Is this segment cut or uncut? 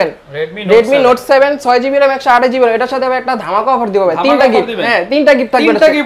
uncut